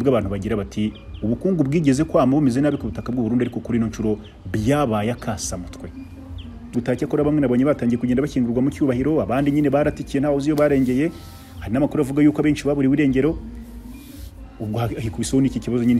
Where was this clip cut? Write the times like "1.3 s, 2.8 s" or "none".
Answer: 6.7 s